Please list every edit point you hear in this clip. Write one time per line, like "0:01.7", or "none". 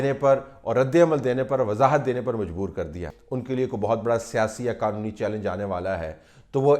0:03.1